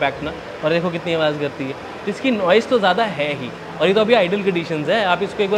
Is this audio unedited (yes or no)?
yes